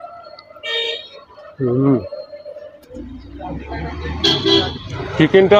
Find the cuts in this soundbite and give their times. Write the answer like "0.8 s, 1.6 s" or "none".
2.8 s